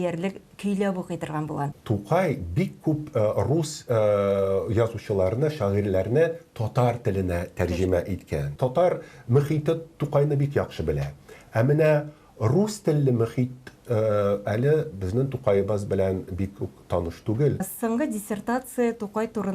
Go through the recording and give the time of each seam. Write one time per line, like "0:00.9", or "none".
0:01.8
0:08.5
0:17.7

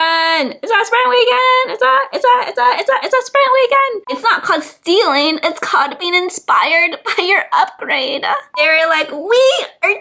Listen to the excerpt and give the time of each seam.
0:04.0
0:08.5

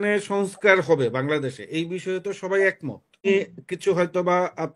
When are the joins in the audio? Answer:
0:03.3

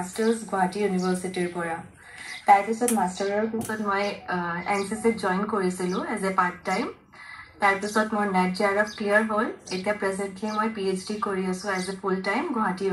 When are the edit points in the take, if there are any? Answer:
none

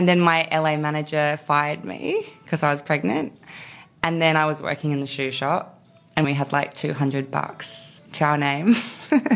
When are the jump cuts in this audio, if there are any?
0:06.2
0:08.1

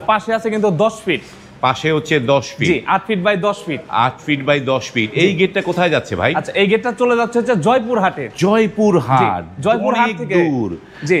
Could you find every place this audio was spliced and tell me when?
none

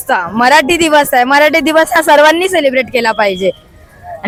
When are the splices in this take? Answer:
none

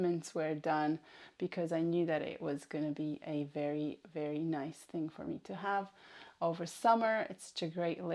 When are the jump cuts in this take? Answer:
none

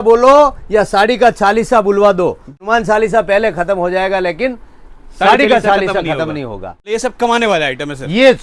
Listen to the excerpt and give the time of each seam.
0:02.6
0:06.9

